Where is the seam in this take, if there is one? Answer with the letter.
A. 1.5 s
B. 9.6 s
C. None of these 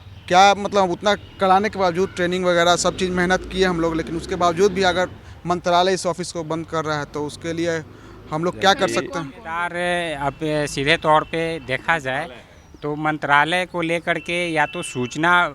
B